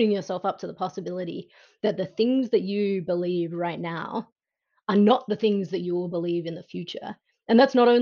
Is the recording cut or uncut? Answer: uncut